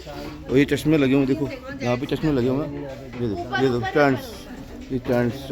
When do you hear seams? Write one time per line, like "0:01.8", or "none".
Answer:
none

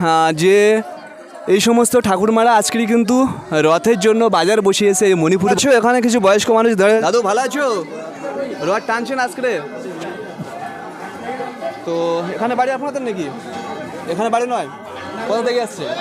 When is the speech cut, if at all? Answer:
0:05.6
0:07.0

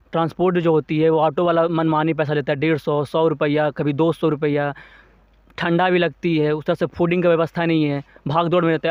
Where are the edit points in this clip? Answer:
none

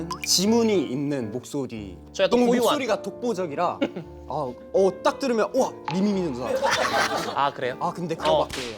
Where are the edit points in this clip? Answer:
0:02.0
0:07.2

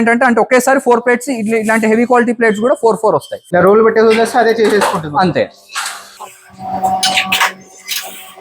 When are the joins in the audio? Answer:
0:03.4

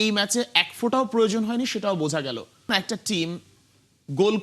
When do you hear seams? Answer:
0:02.7

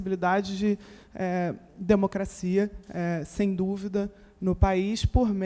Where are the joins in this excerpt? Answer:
none

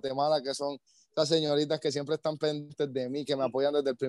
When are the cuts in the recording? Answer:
none

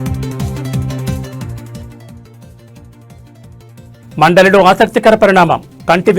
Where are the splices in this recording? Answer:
0:04.0

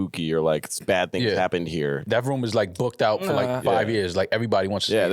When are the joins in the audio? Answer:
0:02.0

